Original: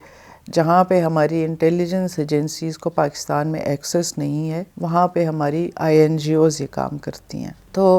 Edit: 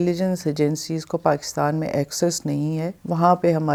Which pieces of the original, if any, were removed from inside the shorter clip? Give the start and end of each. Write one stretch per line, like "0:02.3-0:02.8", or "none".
none